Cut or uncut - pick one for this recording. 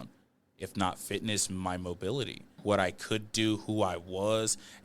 cut